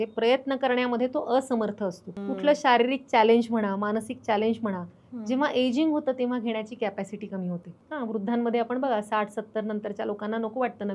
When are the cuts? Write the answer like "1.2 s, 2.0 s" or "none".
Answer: 2.1 s, 7.7 s